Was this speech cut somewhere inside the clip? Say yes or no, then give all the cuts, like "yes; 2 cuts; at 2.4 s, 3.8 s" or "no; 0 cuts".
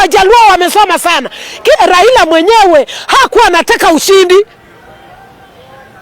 yes; 1 cut; at 1.8 s